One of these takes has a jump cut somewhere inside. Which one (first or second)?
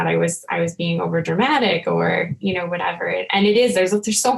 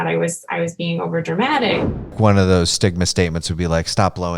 second